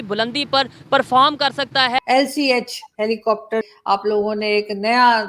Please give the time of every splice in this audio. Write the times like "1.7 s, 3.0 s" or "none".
2.0 s, 3.7 s